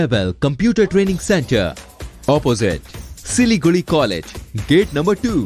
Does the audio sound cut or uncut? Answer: uncut